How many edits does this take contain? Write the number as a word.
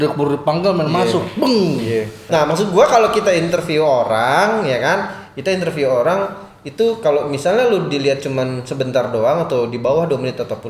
one